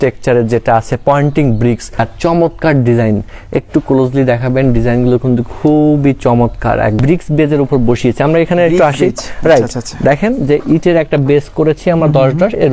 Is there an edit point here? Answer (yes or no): yes